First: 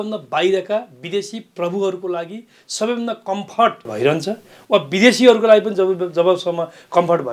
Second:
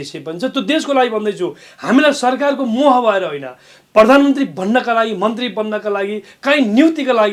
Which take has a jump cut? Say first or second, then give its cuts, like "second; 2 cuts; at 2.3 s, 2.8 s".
first; 1 cut; at 3.9 s